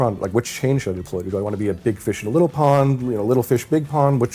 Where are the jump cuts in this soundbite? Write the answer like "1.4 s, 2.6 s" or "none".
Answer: none